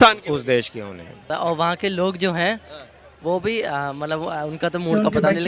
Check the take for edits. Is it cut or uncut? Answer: cut